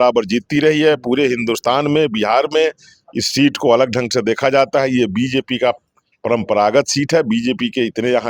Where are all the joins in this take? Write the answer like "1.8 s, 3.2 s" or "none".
none